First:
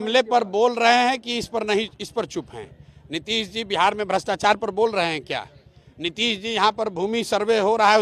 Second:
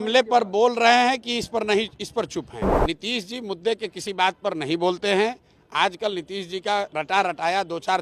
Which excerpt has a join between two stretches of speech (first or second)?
second